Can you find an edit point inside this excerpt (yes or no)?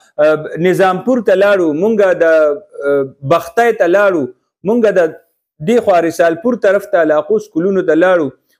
no